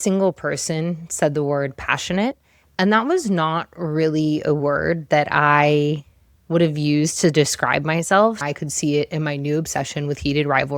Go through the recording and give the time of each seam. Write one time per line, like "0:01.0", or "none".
0:08.4